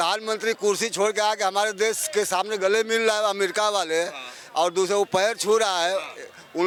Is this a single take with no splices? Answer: yes; 0 cuts

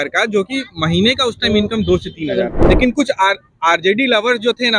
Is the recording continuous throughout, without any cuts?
no; 1 cut; at 2.6 s

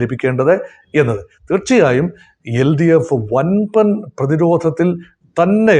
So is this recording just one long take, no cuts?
yes; 0 cuts

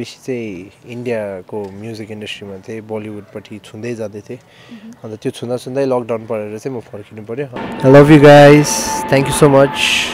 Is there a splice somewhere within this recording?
yes; 1 cut; at 7.6 s

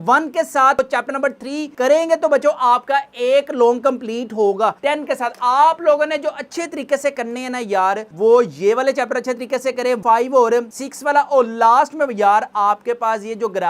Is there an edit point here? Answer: yes; 2 cuts; at 4.8 s, 10.0 s

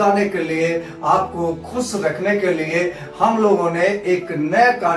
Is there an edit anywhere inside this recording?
no; 0 cuts

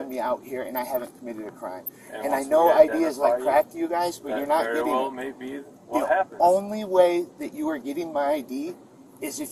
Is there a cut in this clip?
no; 0 cuts

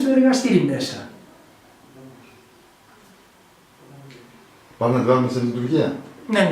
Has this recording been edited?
yes; 1 cut; at 2.1 s

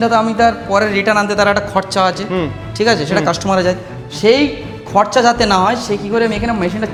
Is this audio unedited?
yes; 0 cuts

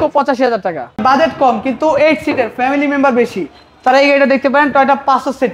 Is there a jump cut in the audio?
yes; 1 cut; at 1.0 s

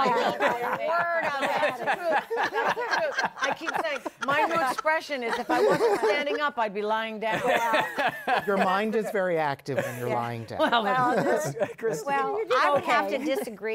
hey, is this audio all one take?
yes; 0 cuts

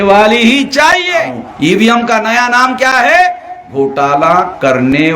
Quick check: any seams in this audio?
yes; 1 cut; at 1.4 s

